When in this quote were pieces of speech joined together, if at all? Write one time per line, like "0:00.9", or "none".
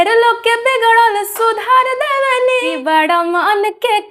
0:02.8